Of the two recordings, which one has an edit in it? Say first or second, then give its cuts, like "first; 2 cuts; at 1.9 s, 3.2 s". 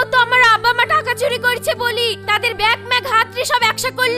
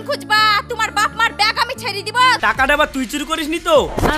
second; 1 cut; at 2.4 s